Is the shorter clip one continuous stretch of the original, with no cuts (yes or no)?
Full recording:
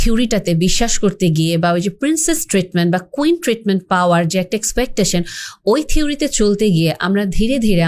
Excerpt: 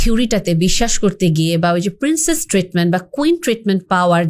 yes